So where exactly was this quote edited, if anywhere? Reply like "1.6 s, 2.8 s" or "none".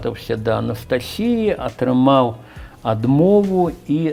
none